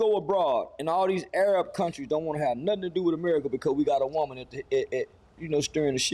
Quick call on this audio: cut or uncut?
uncut